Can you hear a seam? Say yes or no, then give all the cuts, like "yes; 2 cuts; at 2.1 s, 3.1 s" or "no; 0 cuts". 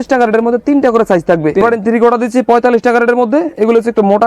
yes; 1 cut; at 1.6 s